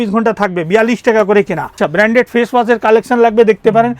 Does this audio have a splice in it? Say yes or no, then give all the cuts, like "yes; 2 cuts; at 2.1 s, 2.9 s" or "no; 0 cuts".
yes; 1 cut; at 1.8 s